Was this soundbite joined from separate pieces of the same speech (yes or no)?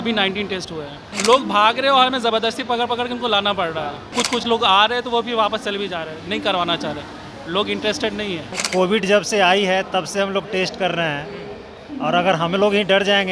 yes